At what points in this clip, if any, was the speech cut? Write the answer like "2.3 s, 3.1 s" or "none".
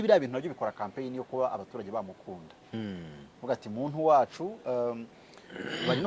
none